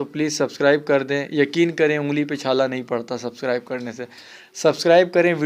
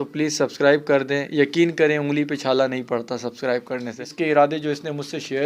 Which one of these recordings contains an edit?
second; 1 cut; at 4.1 s

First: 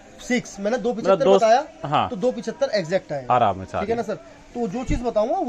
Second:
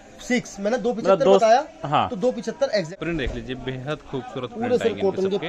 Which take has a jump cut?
second; 1 cut; at 2.9 s

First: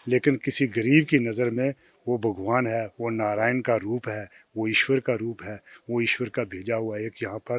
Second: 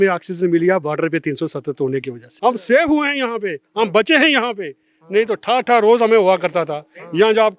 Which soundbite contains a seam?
second; 1 cut; at 2.2 s

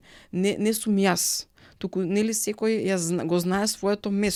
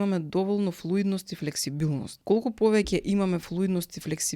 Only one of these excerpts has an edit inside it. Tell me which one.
second; 1 cut; at 2.1 s

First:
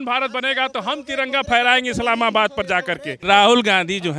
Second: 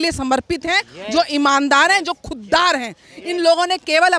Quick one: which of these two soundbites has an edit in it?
first; 1 cut; at 3.2 s

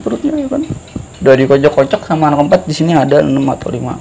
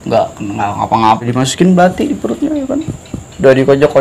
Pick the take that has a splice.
second; 1 cut; at 1.3 s

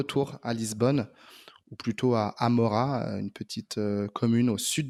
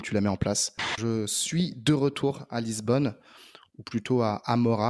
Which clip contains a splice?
second; 1 cut; at 1.0 s

